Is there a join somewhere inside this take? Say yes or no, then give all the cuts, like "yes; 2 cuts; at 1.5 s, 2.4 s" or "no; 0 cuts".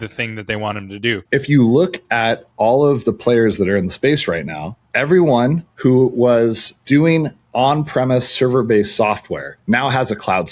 yes; 2 cuts; at 1.2 s, 5.7 s